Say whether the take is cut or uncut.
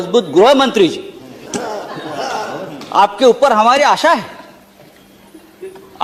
uncut